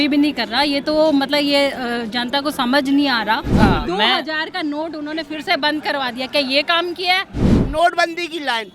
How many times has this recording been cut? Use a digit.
2